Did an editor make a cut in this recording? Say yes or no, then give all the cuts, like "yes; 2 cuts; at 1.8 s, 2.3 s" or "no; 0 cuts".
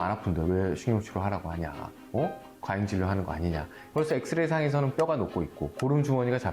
yes; 2 cuts; at 3.8 s, 5.1 s